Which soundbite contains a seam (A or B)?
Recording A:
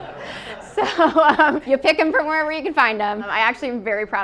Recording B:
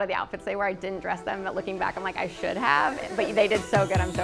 A